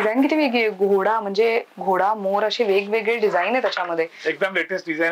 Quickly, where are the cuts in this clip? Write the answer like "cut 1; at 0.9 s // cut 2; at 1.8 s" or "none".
none